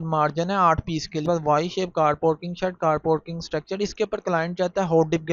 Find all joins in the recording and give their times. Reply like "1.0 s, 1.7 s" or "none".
1.2 s